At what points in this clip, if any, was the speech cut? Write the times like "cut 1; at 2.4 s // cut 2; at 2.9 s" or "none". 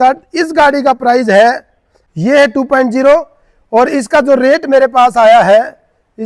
cut 1; at 2.0 s